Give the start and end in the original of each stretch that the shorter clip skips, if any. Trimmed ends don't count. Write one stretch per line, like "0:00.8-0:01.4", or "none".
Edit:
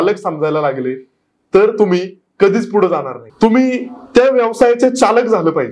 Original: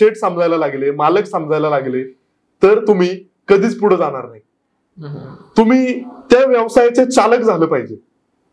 0:04.3-0:05.4